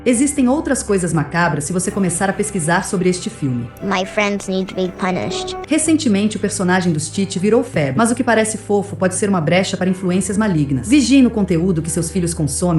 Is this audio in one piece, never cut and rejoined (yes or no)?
yes